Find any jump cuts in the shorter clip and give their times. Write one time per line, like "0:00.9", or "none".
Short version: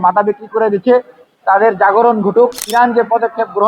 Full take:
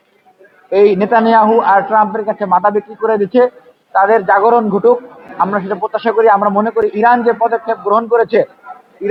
0:02.7